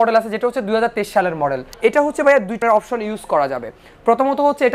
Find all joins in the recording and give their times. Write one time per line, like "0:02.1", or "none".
0:01.7
0:02.6

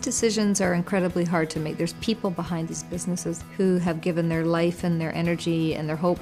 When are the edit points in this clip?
0:02.1

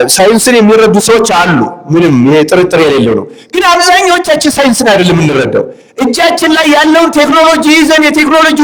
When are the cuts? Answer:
none

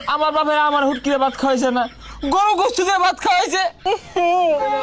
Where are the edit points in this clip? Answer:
0:03.8

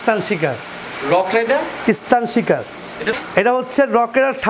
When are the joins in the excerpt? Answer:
0:03.1

